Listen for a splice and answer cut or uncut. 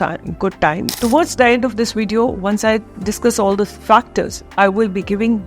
cut